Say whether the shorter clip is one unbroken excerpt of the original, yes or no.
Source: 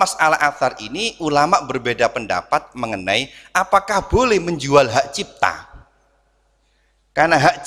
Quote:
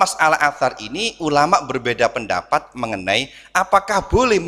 yes